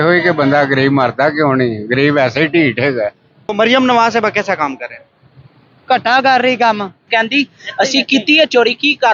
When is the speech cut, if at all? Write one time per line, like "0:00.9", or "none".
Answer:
0:03.5
0:07.0